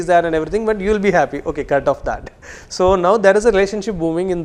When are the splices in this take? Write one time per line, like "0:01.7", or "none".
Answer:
none